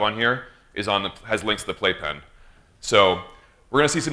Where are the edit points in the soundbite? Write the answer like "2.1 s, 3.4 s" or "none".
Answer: none

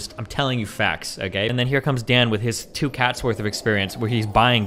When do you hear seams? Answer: 1.5 s

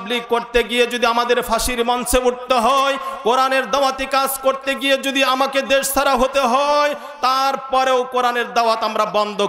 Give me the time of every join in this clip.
none

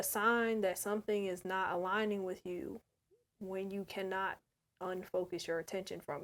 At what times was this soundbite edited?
none

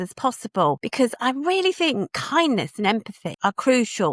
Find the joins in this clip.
0.9 s, 2.2 s, 3.2 s

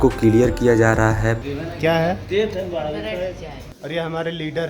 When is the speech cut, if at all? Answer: 1.4 s, 3.6 s

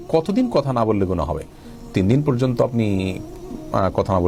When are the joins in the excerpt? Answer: none

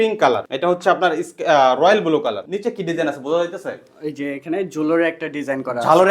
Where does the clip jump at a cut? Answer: 2.4 s

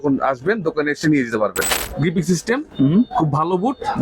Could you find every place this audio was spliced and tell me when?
1.7 s

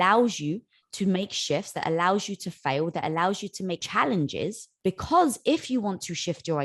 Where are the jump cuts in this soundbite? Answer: 3.8 s, 4.7 s

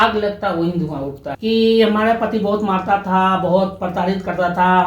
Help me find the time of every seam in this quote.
1.2 s

